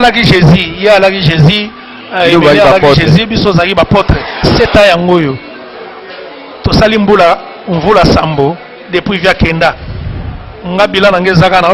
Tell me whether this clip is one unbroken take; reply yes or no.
no